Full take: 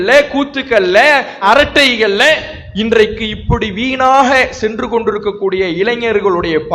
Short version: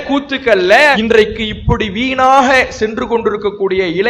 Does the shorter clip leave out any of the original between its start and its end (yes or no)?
yes